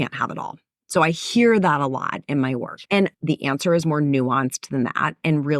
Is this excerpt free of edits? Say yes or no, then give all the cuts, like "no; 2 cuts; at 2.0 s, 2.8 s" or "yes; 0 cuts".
no; 1 cut; at 2.8 s